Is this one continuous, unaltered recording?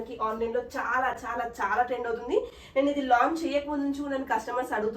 yes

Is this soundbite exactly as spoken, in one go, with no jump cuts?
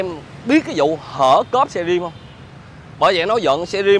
yes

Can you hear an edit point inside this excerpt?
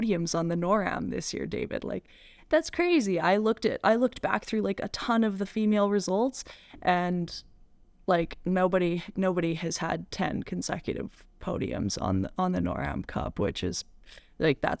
no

